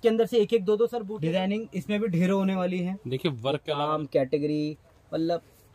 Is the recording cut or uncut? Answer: cut